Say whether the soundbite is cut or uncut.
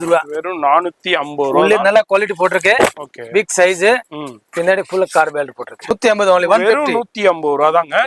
cut